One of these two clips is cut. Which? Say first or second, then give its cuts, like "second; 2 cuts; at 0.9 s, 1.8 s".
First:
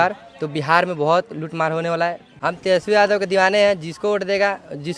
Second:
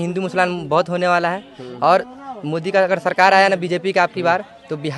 first; 1 cut; at 2.3 s